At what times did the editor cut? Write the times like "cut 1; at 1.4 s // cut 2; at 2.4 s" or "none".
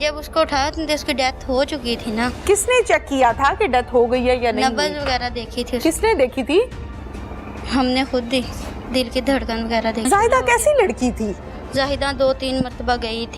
cut 1; at 10.1 s